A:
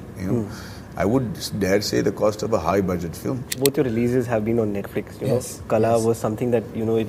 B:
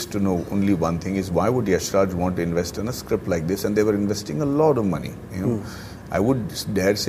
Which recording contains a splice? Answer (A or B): A